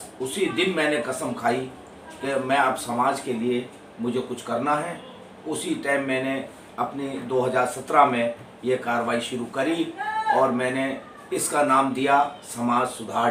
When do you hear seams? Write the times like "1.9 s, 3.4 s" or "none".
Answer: none